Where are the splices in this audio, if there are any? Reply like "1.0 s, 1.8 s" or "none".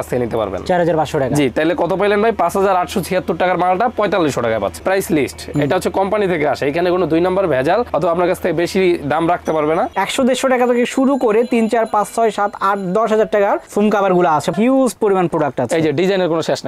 4.8 s, 9.9 s, 14.5 s